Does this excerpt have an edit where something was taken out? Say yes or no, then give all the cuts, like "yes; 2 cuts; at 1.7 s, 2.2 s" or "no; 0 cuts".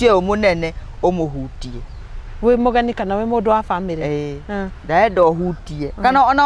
no; 0 cuts